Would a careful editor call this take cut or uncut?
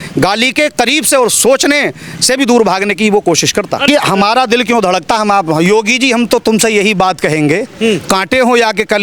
cut